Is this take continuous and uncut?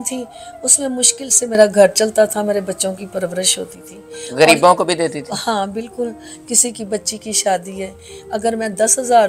yes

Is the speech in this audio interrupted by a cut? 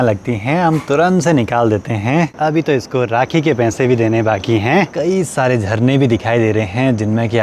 yes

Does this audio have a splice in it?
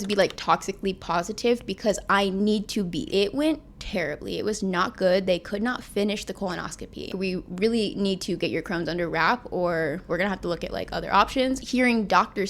yes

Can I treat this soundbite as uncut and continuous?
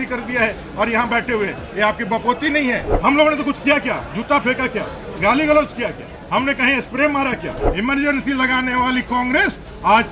no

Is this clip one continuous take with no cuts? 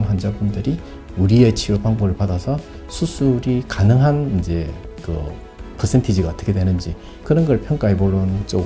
yes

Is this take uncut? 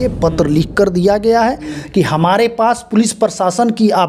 yes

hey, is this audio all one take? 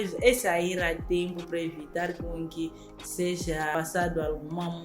no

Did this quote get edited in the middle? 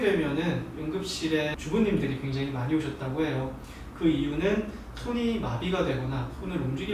no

